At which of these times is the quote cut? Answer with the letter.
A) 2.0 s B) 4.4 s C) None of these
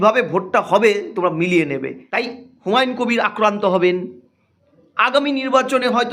A